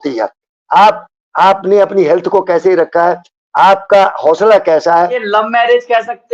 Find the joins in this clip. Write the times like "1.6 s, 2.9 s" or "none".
5.2 s